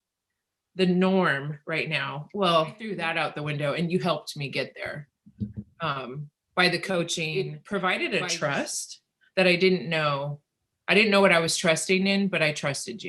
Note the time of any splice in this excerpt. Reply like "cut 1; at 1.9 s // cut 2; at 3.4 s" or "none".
cut 1; at 3.0 s // cut 2; at 7.3 s